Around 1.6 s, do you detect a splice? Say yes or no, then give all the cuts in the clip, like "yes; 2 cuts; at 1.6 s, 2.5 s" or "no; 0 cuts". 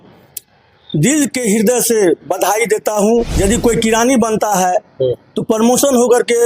no; 1 cut; at 3.3 s